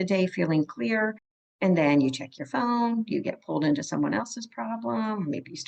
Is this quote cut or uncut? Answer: uncut